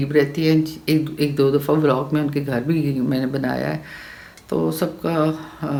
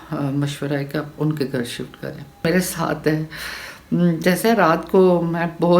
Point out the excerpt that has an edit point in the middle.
second; 1 cut; at 2.4 s

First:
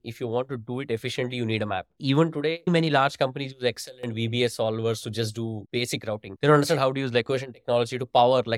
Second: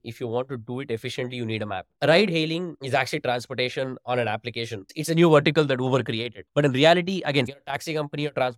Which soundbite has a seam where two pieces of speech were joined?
second; 3 cuts; at 2.0 s, 2.8 s, 7.5 s

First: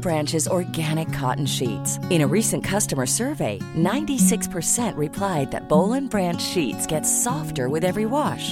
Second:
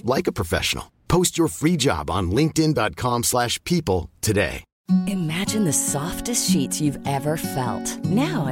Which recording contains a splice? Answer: second; 1 cut; at 4.7 s

